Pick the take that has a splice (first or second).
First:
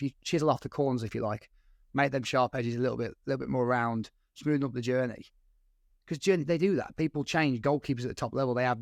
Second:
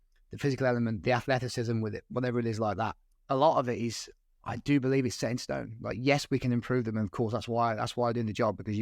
second